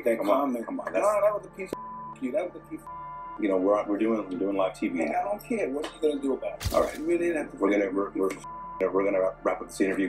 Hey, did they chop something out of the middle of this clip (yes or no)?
yes